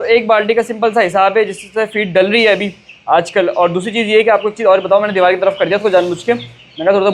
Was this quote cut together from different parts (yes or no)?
no